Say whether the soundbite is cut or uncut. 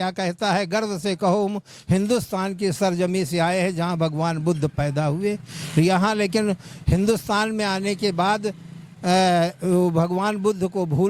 uncut